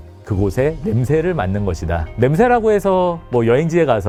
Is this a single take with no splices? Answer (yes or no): yes